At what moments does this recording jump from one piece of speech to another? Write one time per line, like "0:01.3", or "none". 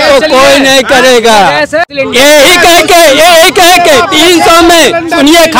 0:01.9

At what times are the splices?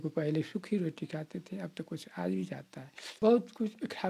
0:03.2

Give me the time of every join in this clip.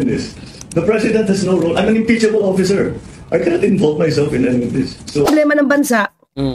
0:05.3

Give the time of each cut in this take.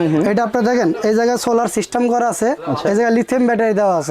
none

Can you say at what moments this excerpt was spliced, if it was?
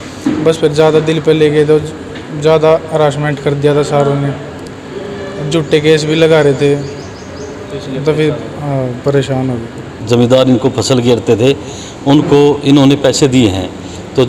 0:09.9

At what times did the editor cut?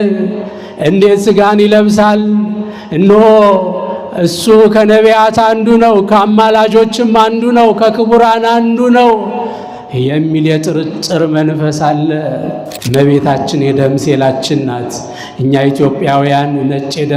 0:12.7

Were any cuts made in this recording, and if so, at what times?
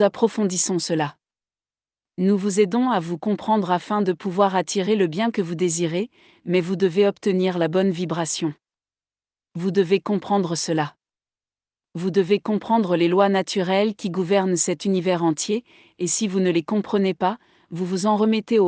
none

